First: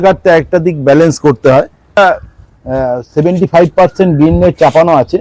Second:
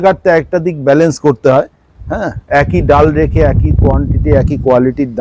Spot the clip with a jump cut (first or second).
first